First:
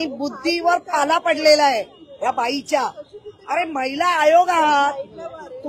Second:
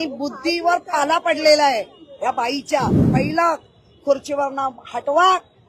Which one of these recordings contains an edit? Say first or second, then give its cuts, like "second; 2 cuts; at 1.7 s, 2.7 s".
second; 1 cut; at 3.1 s